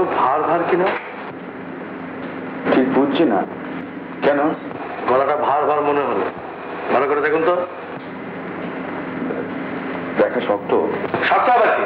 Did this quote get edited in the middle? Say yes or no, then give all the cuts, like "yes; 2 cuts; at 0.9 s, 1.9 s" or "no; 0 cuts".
no; 0 cuts